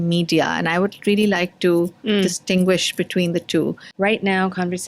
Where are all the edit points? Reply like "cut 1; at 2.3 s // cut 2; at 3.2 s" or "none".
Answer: cut 1; at 3.8 s